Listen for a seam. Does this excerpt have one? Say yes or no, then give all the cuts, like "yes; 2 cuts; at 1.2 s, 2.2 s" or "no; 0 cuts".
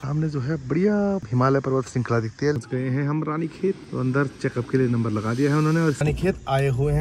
yes; 4 cuts; at 1.3 s, 2.6 s, 3.9 s, 6.0 s